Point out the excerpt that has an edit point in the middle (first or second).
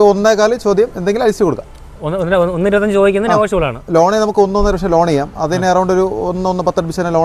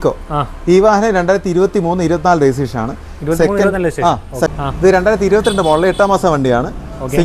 second